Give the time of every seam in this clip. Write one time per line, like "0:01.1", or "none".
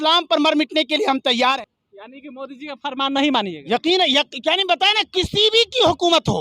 0:01.6

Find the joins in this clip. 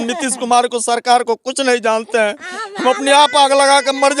none

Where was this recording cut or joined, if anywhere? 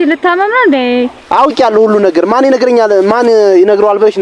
0:01.2

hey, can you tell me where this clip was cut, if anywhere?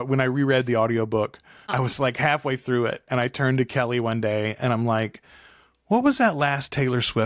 0:01.7

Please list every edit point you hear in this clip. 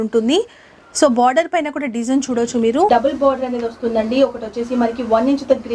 0:02.9

